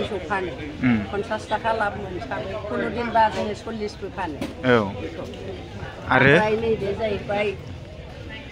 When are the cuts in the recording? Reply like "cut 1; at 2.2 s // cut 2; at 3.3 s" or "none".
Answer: none